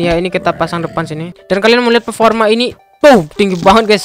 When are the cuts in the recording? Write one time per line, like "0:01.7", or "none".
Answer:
0:01.3